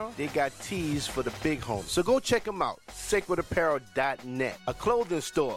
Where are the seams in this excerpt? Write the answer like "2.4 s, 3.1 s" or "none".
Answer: none